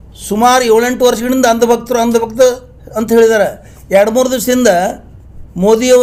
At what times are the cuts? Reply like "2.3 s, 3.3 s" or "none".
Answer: none